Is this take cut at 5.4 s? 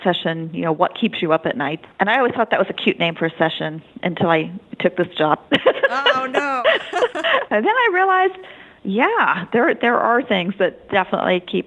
no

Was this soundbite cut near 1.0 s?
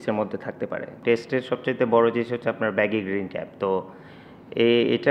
yes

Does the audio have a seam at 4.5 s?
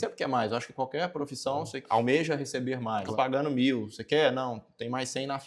no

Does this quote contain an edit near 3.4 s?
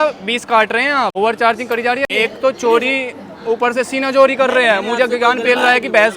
no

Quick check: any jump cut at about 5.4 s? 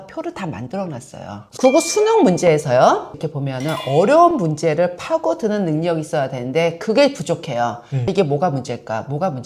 no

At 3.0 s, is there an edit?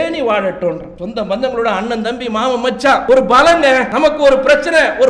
yes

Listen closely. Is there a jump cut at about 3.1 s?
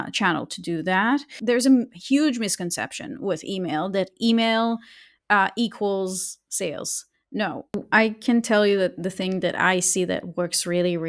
no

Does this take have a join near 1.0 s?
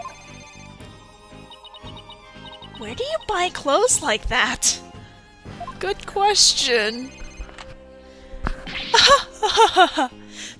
no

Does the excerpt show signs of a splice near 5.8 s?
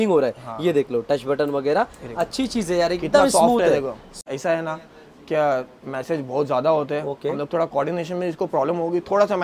no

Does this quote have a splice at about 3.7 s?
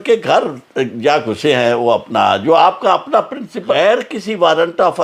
yes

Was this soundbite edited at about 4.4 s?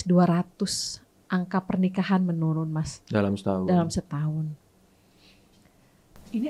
no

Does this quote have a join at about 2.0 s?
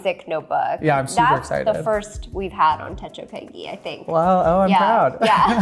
no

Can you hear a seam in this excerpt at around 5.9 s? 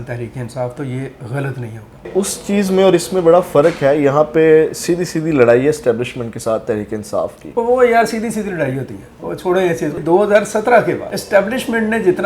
no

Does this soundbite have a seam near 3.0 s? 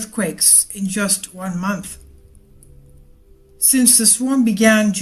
no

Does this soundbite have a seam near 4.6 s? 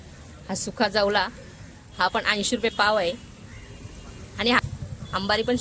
yes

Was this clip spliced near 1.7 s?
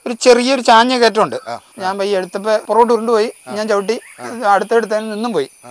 yes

